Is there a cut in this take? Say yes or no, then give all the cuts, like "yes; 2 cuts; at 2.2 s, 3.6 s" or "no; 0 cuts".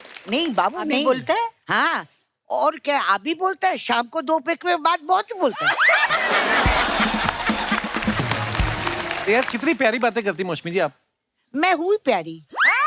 yes; 1 cut; at 9.2 s